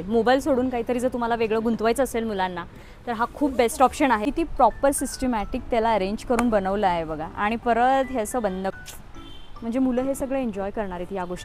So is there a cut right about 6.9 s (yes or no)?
no